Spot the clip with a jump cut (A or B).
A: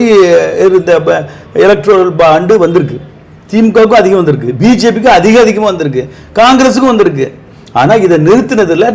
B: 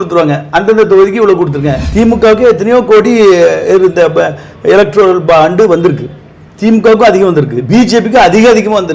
B